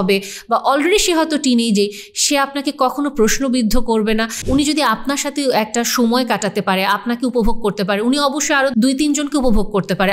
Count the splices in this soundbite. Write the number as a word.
two